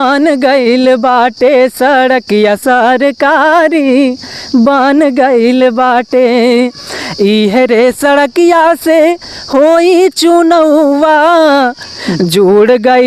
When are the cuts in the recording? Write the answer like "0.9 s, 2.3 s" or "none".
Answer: none